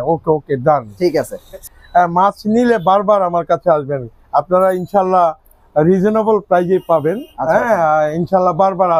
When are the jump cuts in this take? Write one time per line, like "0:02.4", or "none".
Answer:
0:01.6